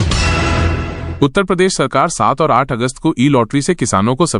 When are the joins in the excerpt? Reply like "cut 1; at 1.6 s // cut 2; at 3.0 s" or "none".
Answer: cut 1; at 0.9 s